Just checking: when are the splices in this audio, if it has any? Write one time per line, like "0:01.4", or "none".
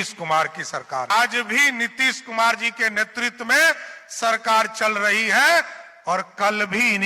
0:01.1

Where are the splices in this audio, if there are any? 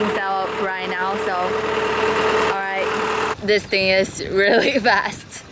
0:03.3

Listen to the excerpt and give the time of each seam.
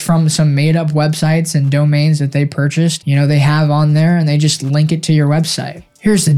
0:03.0

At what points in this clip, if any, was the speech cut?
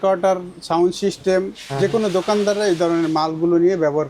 none

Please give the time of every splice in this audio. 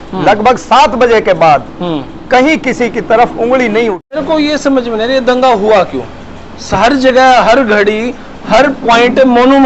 0:04.2

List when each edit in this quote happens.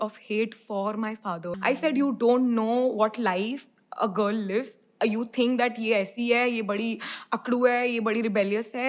0:01.5

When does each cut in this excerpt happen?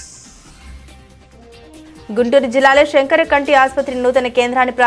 none

